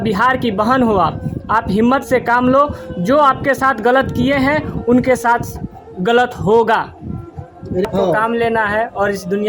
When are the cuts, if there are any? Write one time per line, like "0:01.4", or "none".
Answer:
0:07.9